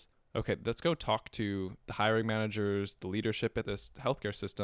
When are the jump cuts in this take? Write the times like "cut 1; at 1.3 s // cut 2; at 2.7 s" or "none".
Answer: cut 1; at 1.8 s // cut 2; at 3.7 s